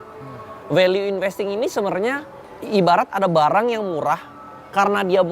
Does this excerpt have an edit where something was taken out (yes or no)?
yes